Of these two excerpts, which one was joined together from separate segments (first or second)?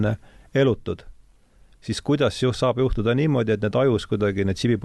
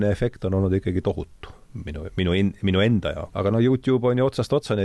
second